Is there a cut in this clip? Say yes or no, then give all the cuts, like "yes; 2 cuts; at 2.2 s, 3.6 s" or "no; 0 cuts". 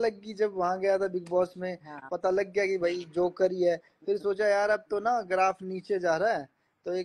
no; 0 cuts